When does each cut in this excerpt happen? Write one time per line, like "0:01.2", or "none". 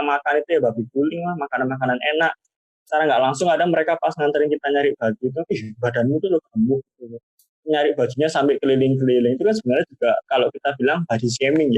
none